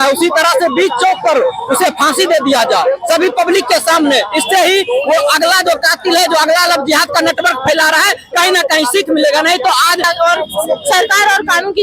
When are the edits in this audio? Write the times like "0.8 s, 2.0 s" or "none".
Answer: 10.0 s